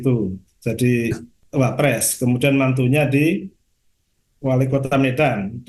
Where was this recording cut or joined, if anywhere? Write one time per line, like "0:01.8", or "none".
0:01.3